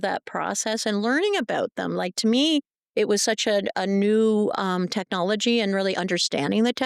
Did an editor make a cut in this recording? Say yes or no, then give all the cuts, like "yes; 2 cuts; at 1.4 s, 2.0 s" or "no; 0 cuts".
no; 0 cuts